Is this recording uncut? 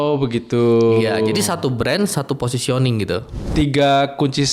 no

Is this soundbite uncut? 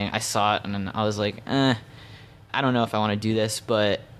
no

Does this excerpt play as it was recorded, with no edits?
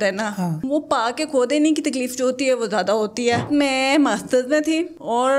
no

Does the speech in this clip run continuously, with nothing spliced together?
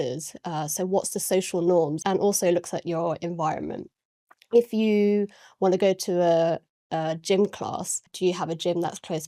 no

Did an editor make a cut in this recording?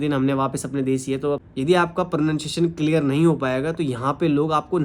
yes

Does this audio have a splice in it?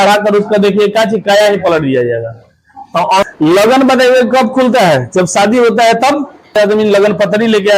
yes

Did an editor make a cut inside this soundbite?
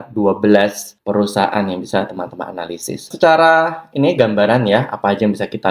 no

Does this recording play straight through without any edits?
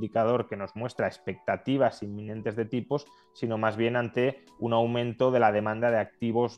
yes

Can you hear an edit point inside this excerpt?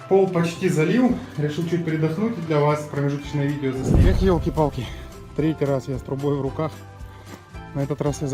yes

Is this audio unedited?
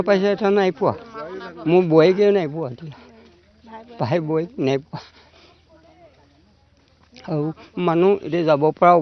yes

